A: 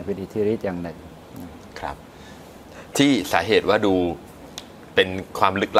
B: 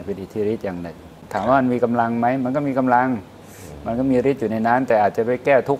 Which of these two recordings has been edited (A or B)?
B